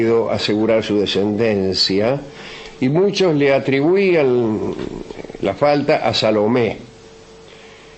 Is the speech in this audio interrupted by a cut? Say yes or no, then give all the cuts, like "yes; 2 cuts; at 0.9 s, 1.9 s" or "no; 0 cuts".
no; 0 cuts